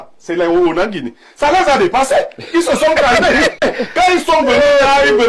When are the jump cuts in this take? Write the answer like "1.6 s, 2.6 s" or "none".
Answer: 3.6 s

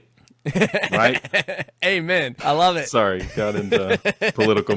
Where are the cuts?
2.3 s

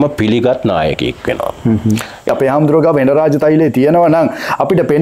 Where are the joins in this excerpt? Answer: 2.3 s

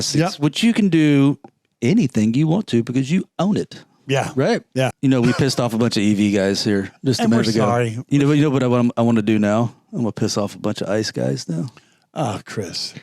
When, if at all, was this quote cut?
4.9 s

